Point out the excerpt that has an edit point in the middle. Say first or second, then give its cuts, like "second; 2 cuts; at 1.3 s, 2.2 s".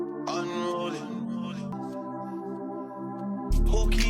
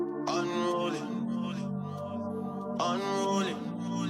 first; 1 cut; at 1.7 s